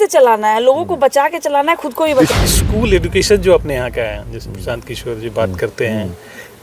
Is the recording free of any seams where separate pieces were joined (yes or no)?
no